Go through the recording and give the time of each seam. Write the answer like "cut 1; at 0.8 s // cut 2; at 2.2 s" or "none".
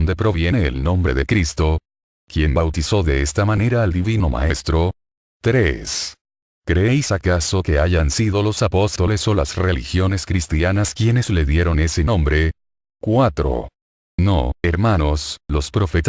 cut 1; at 11.0 s